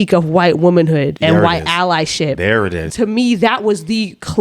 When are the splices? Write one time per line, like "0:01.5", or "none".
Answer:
0:01.1
0:02.8